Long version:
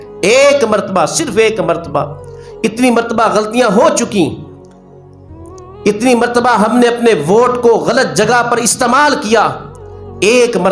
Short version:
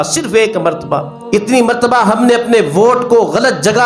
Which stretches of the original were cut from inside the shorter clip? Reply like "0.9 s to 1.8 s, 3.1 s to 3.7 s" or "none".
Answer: 2.2 s to 5.7 s